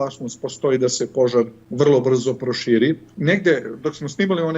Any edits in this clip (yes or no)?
yes